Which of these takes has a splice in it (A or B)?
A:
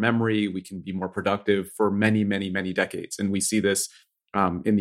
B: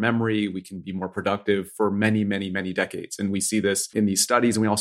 B